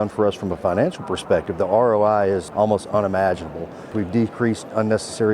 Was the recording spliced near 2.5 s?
yes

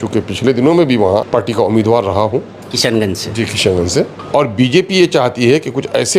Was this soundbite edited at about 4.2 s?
yes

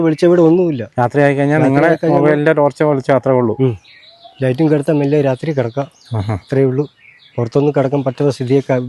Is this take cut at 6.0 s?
no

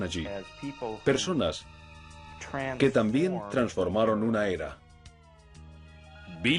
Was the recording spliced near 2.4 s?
no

